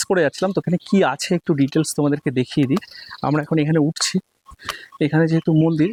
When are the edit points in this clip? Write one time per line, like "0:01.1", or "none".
none